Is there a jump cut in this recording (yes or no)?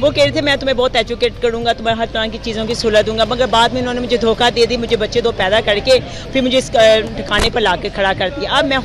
no